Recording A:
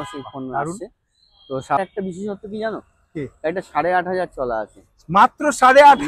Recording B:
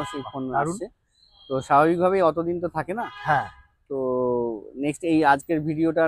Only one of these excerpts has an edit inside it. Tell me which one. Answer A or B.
A